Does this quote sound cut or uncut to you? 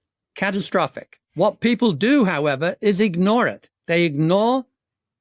uncut